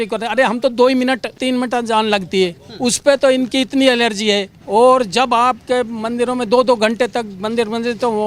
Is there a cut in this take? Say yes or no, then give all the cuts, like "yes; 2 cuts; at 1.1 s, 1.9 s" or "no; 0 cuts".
yes; 2 cuts; at 1.4 s, 4.5 s